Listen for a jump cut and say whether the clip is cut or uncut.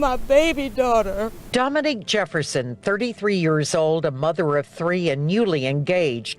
cut